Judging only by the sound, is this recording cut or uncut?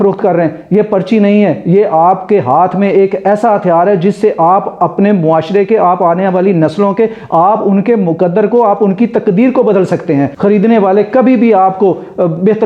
cut